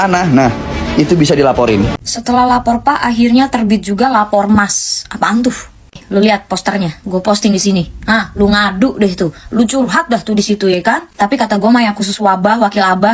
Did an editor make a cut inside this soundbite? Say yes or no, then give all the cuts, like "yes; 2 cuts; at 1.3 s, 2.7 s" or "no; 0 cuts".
yes; 1 cut; at 2.0 s